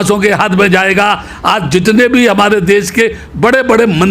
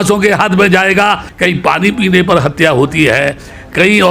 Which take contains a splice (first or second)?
second